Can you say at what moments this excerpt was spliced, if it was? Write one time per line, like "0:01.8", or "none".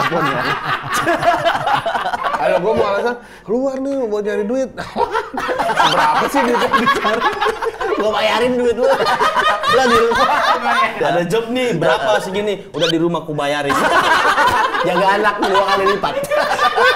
0:02.4
0:11.0